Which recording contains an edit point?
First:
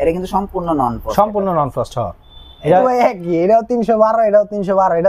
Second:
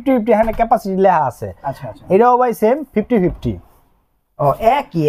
first; 1 cut; at 2.8 s

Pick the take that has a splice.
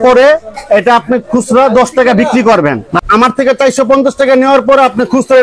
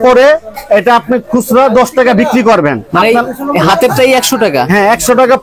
first; 1 cut; at 2.9 s

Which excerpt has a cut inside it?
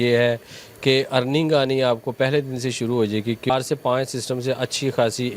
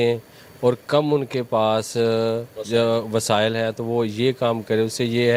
first; 1 cut; at 3.5 s

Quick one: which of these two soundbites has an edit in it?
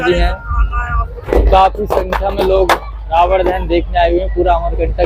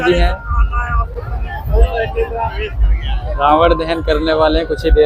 first; 1 cut; at 1.2 s

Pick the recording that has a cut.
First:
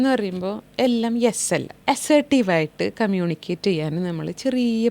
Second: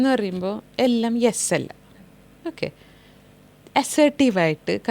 first; 1 cut; at 1.7 s

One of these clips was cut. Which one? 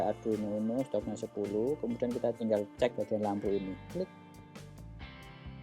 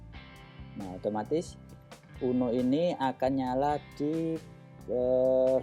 first; 1 cut; at 2.5 s

